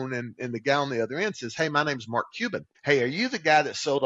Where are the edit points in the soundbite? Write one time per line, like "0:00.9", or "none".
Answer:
0:02.7